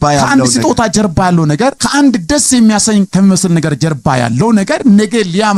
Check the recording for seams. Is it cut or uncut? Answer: uncut